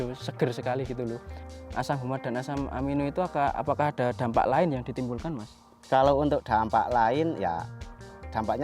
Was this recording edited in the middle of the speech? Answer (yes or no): yes